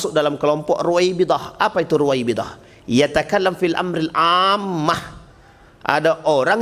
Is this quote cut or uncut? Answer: uncut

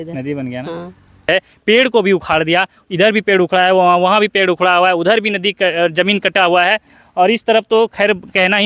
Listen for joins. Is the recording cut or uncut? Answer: cut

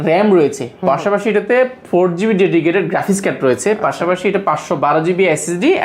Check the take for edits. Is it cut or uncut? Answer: uncut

